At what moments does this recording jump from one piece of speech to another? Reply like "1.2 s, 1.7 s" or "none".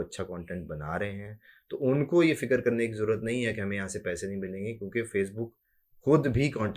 none